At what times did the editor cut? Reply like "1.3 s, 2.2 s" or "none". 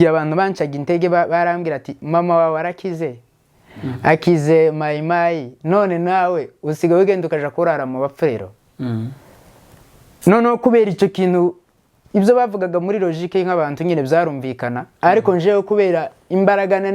none